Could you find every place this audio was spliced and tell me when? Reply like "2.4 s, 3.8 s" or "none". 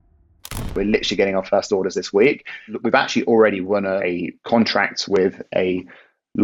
0.7 s, 2.7 s, 4.0 s